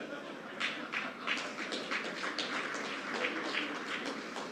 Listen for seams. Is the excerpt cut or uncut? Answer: uncut